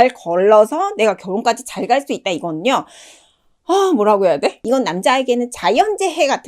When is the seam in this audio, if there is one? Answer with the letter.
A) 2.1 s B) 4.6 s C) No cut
B